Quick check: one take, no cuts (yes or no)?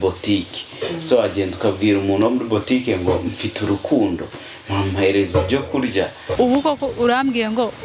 no